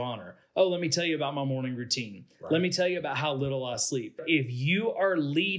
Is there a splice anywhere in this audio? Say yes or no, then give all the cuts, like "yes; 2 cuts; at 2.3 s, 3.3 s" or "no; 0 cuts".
yes; 1 cut; at 4.2 s